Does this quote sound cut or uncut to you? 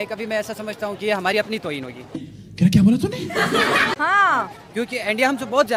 uncut